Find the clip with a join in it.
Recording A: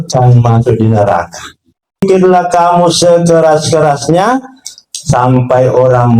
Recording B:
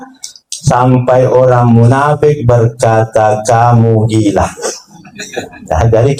A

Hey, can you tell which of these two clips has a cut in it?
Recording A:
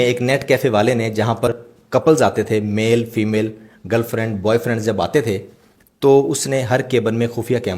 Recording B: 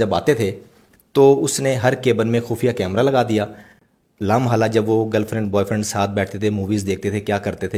A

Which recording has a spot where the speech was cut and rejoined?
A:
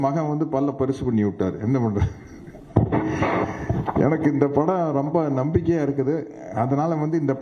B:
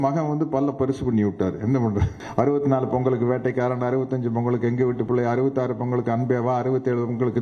B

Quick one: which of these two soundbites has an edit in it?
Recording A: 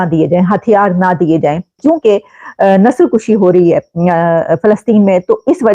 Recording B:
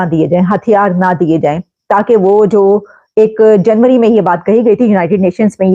A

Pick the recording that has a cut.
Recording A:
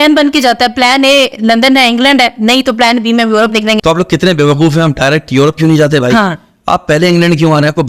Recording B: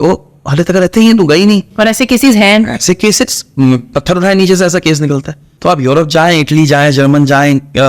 B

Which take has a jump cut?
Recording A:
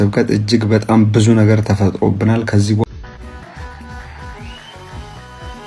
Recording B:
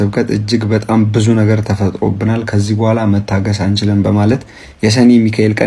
A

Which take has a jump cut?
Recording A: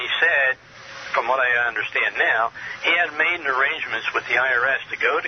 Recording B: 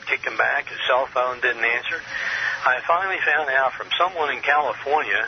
A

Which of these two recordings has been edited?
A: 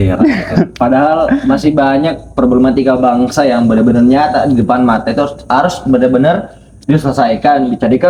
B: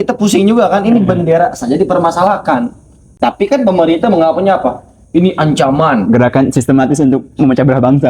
B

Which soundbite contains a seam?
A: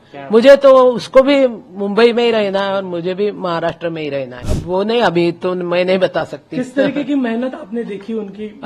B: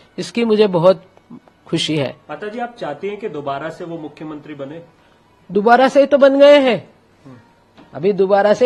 A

